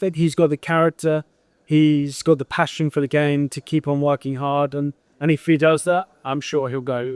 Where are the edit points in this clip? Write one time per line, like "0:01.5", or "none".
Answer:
none